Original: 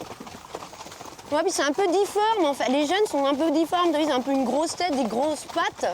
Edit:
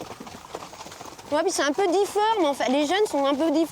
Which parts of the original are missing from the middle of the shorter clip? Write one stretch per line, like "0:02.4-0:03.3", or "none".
none